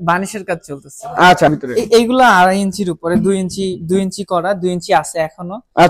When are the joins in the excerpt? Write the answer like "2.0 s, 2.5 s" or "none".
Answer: 1.5 s